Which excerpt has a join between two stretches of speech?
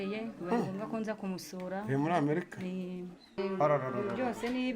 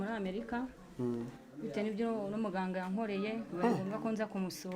first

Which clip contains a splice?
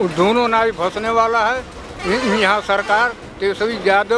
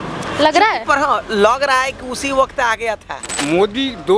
second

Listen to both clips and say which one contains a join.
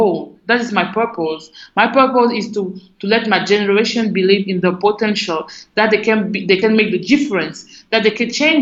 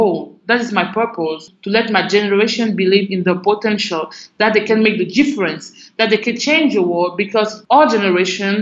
second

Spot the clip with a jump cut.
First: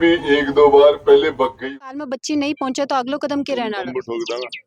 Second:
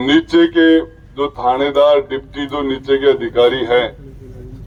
first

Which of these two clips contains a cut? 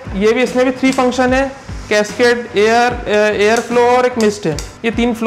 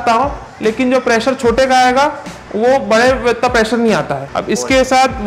second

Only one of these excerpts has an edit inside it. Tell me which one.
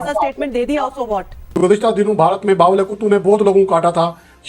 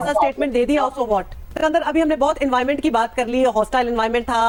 first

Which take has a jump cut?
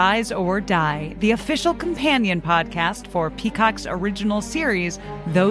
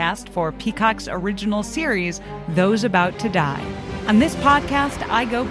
second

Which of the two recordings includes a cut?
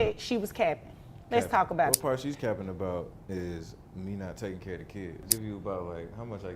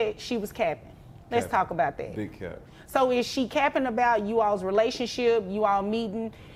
first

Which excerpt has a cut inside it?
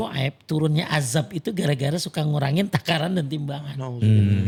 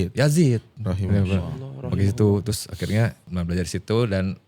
second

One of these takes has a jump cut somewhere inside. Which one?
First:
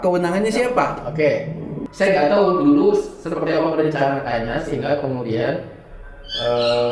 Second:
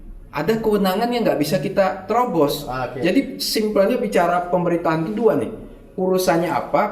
first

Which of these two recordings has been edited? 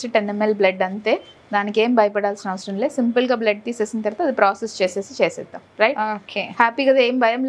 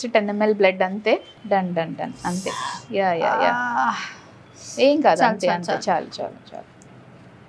second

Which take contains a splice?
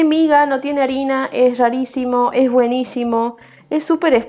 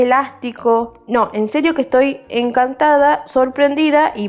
second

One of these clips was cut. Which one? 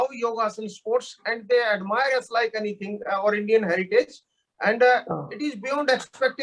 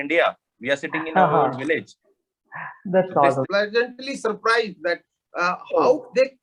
second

